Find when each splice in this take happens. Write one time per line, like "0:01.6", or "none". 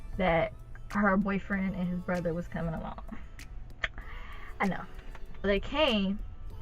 0:05.3